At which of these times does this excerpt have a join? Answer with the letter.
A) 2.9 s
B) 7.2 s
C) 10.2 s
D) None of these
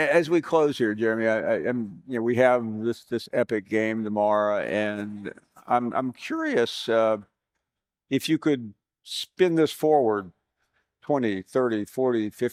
D